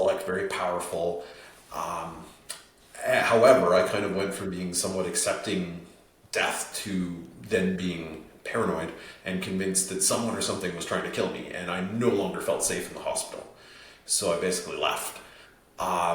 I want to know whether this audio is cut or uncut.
uncut